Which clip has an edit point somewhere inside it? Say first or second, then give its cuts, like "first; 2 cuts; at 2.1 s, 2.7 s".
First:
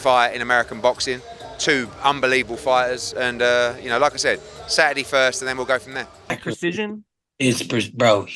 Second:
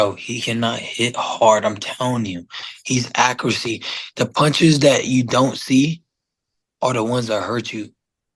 first; 1 cut; at 6.4 s